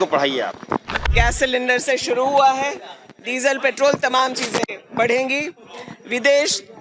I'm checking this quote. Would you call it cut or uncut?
cut